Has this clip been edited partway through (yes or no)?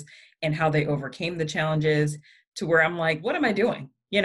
yes